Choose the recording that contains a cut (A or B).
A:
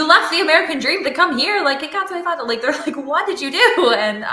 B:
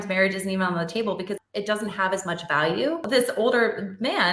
B